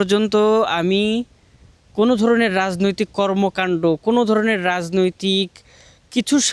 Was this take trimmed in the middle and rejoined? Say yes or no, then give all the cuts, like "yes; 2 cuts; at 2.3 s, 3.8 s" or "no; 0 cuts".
no; 0 cuts